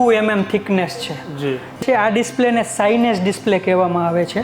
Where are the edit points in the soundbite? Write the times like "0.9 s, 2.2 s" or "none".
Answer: 1.8 s